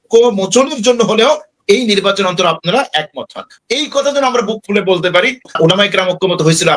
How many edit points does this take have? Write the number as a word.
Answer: two